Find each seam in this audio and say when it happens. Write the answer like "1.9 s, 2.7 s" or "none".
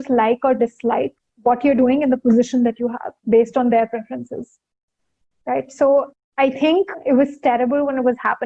1.2 s, 6.7 s